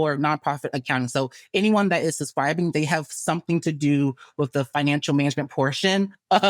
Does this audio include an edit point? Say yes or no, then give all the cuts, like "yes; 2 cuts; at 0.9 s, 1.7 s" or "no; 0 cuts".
no; 0 cuts